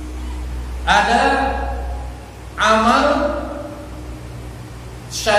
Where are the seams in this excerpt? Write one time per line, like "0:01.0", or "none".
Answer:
none